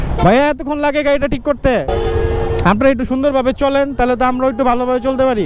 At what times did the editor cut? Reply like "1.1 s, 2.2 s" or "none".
1.9 s